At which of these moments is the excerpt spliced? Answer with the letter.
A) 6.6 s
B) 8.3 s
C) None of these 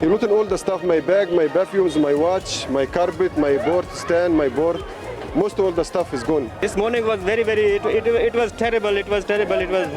A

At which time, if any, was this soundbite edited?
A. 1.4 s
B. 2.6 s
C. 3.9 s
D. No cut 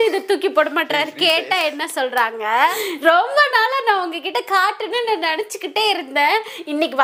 B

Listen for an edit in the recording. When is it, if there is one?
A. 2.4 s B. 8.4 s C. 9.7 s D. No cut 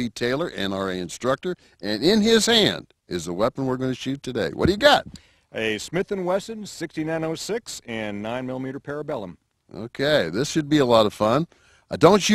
B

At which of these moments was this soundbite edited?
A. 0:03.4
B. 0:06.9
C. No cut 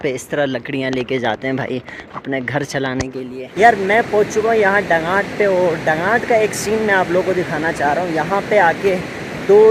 A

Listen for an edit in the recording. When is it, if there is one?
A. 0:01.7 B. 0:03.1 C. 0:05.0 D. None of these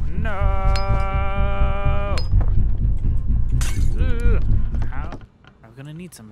C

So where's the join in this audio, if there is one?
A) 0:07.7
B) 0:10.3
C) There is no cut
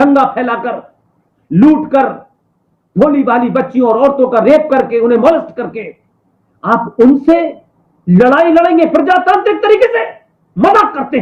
C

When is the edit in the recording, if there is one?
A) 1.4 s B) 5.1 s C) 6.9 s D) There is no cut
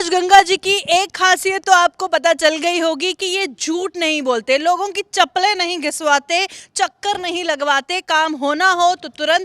D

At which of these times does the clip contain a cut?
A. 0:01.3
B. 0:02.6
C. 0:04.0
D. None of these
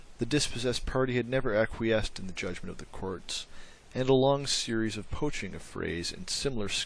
A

